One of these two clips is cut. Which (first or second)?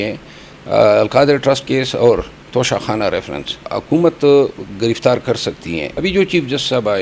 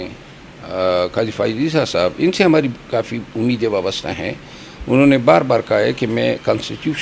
first